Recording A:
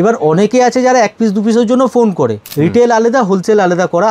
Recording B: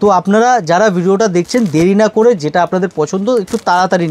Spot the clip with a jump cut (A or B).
A